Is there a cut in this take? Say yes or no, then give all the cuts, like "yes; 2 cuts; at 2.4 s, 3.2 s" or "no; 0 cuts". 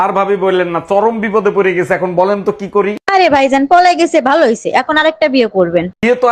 no; 0 cuts